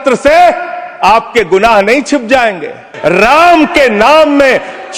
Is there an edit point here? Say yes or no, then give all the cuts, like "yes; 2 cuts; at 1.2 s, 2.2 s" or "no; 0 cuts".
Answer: yes; 1 cut; at 2.9 s